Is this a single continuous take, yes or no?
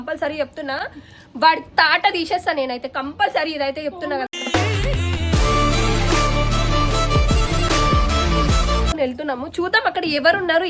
yes